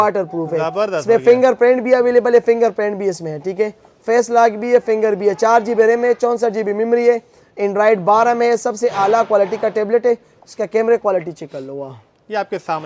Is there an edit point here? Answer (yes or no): no